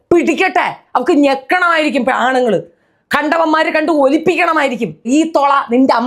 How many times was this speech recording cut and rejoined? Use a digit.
1